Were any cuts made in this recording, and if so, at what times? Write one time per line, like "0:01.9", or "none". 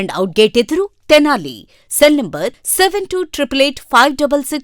none